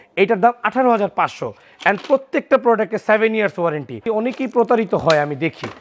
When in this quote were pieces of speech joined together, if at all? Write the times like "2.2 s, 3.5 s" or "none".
4.0 s